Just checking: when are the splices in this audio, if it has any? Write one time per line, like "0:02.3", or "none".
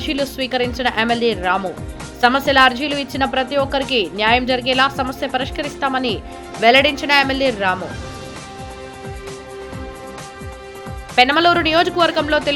none